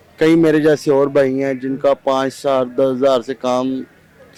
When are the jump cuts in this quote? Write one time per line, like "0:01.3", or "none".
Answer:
none